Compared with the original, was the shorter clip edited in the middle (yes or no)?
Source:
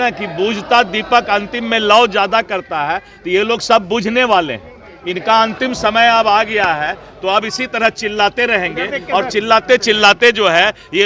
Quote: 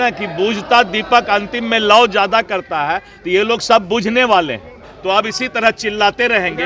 yes